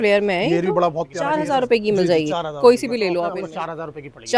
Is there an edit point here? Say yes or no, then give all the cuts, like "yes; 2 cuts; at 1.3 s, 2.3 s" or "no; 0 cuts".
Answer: yes; 2 cuts; at 1.2 s, 3.4 s